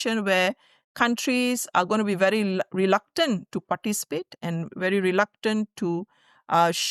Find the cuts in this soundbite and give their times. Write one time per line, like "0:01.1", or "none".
none